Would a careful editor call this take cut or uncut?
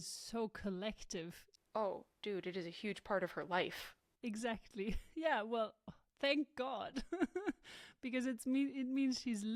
uncut